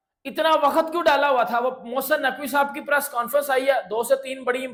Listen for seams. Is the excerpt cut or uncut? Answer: uncut